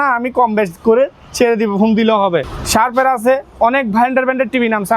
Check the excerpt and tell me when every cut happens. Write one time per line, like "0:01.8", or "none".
0:02.6

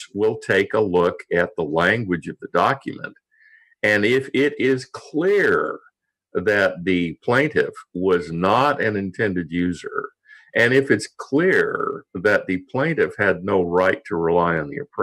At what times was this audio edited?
none

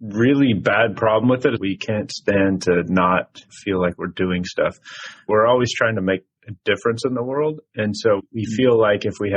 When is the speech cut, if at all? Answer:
0:01.6
0:05.3
0:08.2

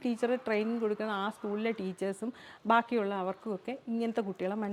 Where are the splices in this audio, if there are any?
none

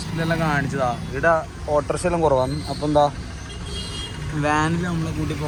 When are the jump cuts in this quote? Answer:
none

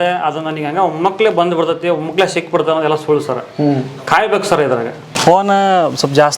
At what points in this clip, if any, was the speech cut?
0:05.1

